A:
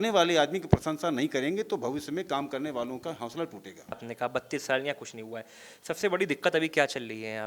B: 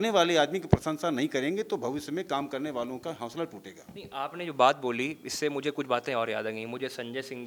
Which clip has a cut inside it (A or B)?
A